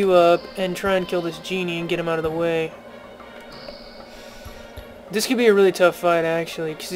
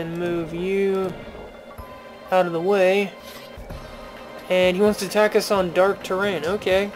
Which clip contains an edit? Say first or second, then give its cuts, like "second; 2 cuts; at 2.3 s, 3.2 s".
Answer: second; 1 cut; at 3.8 s